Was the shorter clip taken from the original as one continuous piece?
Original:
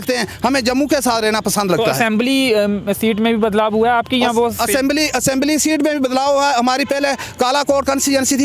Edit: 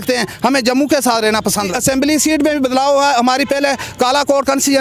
no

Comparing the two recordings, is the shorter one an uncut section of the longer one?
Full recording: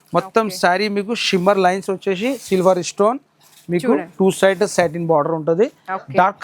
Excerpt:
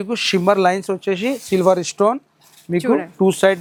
yes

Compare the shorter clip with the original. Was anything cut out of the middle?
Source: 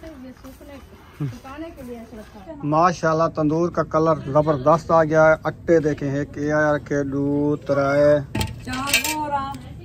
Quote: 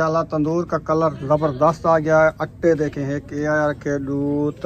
no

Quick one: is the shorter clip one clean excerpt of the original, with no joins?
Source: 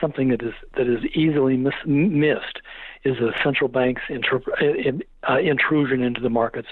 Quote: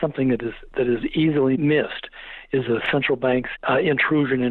no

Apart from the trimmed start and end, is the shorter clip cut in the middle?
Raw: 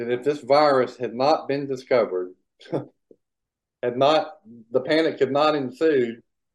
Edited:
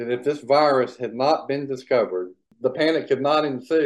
yes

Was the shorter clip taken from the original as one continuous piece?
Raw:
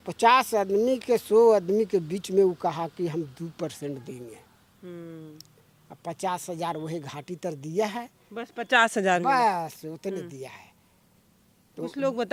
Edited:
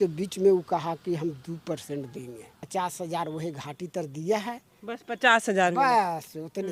no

